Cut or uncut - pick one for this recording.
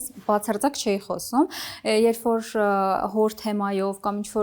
uncut